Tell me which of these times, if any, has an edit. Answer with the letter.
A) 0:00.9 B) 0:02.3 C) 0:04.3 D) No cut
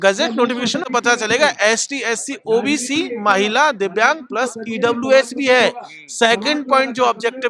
A